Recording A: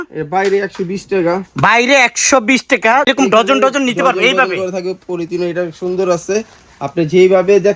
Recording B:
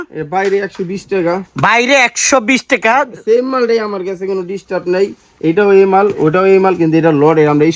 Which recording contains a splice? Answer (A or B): A